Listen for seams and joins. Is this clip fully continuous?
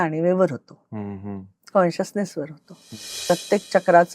no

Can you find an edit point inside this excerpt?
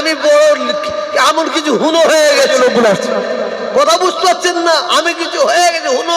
no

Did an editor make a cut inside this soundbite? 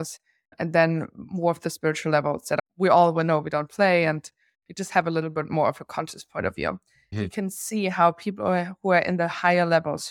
yes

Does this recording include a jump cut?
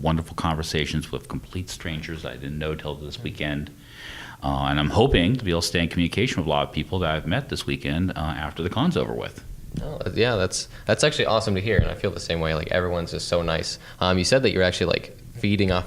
yes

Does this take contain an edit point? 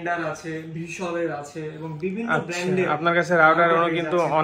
no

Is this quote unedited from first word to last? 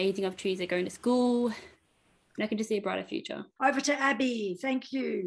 no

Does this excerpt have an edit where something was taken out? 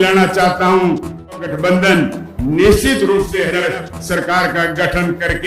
yes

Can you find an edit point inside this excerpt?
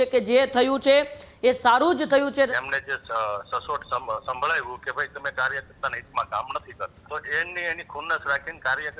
yes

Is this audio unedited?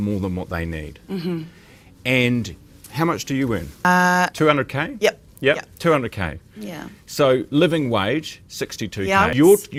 yes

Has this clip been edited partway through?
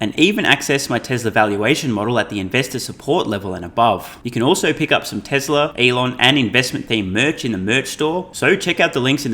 yes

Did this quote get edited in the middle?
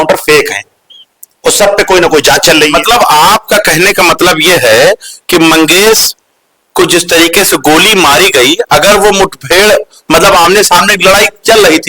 no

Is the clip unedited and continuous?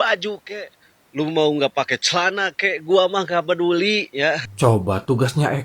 no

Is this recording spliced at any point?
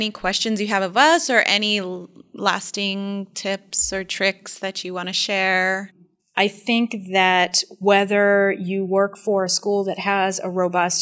yes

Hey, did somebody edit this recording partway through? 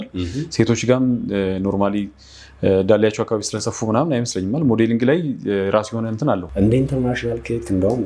yes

